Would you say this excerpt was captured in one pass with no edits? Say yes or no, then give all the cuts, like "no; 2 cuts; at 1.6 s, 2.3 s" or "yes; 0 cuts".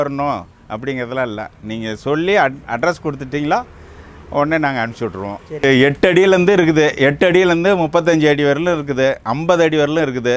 no; 1 cut; at 5.6 s